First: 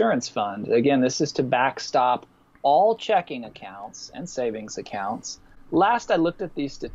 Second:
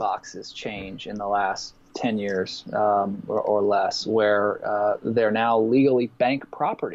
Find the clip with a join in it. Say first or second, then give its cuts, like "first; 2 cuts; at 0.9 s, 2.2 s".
first; 1 cut; at 5.5 s